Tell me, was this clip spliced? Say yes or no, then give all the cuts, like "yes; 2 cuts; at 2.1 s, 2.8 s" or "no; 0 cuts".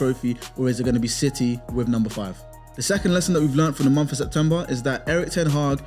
no; 0 cuts